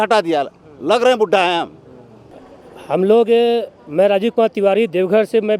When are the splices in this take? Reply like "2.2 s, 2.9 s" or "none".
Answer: none